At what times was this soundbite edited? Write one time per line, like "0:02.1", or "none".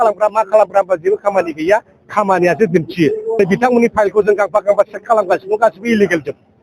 0:03.4